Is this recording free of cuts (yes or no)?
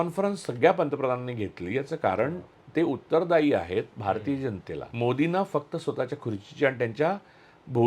no